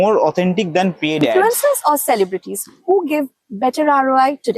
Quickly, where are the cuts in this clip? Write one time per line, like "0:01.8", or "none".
0:01.3